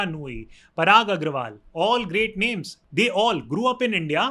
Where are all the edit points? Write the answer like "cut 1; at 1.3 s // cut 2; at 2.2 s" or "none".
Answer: cut 1; at 2.8 s